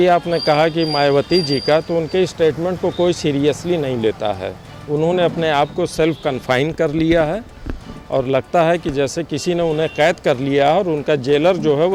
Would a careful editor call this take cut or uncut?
uncut